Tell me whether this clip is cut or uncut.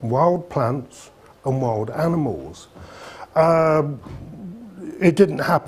uncut